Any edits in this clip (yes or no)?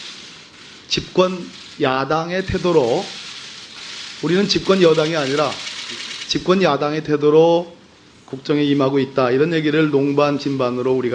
yes